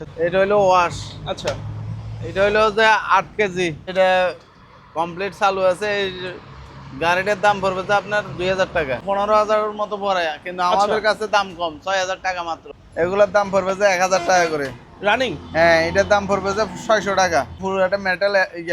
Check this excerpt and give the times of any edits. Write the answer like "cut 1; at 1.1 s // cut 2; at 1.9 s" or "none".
cut 1; at 3.9 s // cut 2; at 9.0 s // cut 3; at 12.6 s // cut 4; at 17.6 s

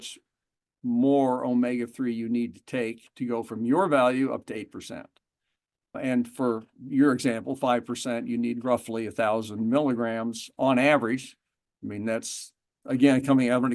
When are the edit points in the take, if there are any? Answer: cut 1; at 6.0 s

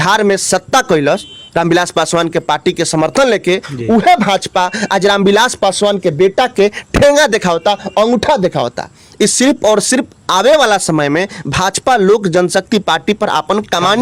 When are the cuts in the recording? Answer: none

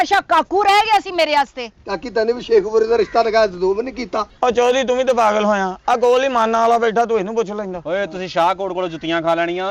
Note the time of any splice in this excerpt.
none

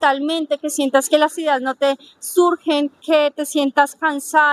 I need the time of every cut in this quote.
none

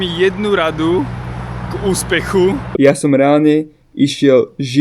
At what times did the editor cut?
cut 1; at 2.7 s

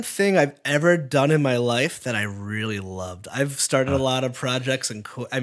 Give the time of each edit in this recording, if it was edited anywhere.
none

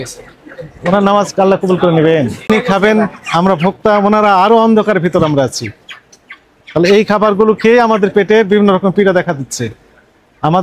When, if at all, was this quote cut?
cut 1; at 2.5 s

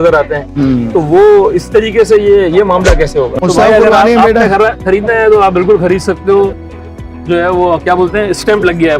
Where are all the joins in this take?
cut 1; at 3.3 s

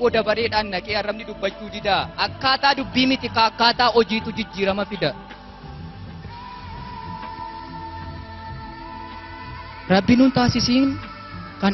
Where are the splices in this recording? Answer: none

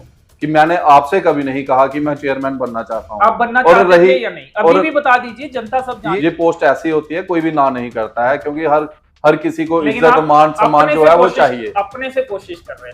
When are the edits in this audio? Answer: cut 1; at 6.1 s

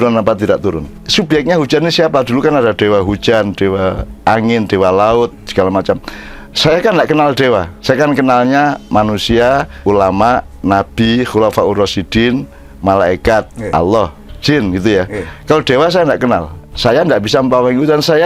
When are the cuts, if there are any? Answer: cut 1; at 1.0 s // cut 2; at 7.7 s // cut 3; at 9.7 s // cut 4; at 16.7 s

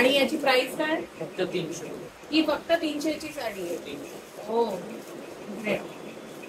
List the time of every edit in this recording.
none

